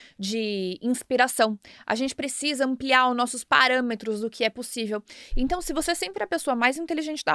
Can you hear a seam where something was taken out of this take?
no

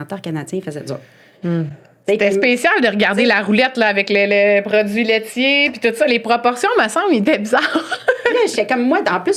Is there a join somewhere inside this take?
no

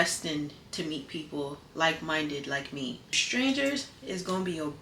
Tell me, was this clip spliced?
yes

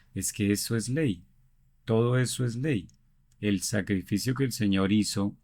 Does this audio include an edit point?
no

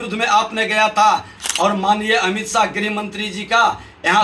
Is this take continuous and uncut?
no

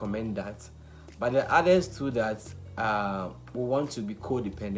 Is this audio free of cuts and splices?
yes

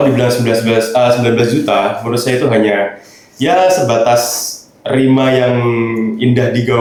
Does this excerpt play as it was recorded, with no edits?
yes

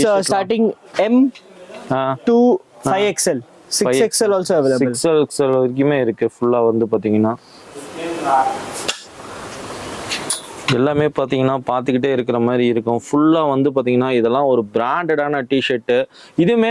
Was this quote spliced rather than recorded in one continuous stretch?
no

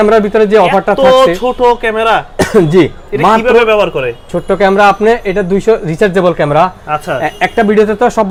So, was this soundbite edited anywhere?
no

